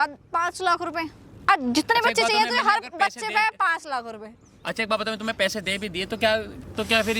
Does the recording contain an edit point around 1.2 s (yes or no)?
no